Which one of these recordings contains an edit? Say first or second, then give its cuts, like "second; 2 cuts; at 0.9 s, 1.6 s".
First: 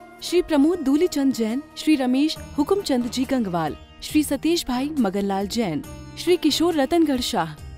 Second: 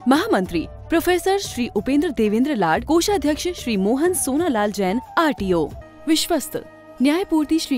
second; 1 cut; at 5.8 s